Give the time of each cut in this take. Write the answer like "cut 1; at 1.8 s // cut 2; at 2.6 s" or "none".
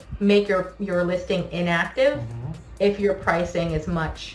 none